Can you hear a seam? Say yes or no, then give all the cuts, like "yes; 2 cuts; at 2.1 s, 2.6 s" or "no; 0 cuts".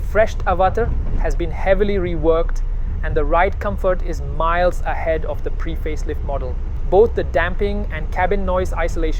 yes; 1 cut; at 6.7 s